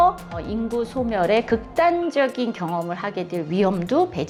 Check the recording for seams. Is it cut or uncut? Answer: uncut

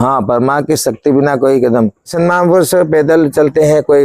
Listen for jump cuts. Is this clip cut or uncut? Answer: cut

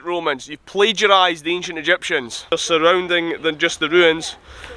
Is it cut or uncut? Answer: cut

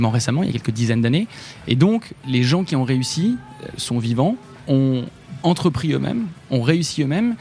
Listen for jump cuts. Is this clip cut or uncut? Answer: cut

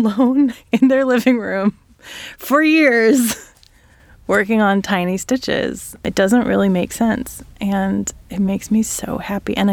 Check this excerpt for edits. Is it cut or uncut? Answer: uncut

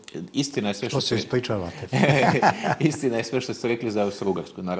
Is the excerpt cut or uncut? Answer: uncut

